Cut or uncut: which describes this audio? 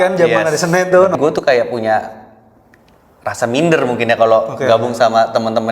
cut